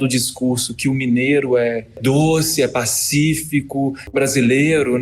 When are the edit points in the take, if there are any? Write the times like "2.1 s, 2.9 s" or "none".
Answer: 2.0 s, 4.1 s